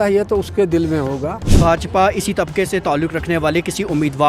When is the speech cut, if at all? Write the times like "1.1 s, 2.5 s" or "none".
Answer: 1.6 s